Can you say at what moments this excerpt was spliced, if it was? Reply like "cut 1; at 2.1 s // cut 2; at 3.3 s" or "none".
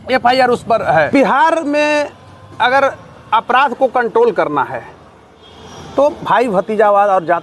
cut 1; at 1.1 s